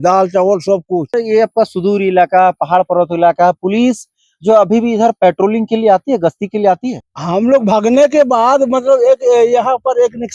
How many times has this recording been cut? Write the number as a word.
two